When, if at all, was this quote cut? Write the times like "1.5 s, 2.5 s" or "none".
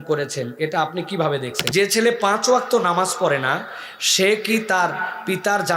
1.6 s